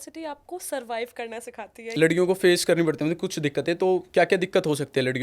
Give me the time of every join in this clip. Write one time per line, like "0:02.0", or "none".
0:01.9